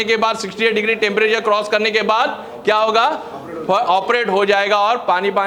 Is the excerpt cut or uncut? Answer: uncut